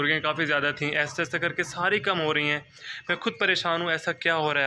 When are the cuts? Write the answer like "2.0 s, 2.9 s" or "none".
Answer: none